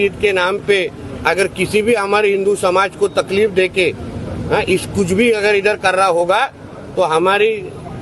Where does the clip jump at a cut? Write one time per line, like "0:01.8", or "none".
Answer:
0:05.6